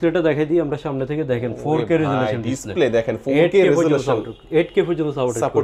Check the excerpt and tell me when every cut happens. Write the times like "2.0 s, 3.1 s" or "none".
none